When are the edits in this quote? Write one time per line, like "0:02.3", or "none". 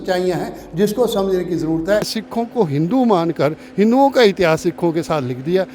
0:02.2